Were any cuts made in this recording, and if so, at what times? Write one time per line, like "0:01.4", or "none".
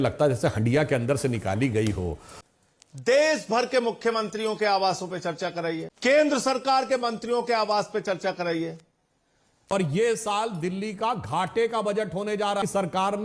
0:02.3
0:09.7